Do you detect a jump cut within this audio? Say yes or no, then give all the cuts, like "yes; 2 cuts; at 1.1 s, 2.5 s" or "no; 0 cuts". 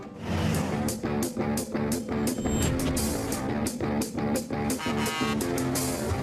yes; 1 cut; at 4.8 s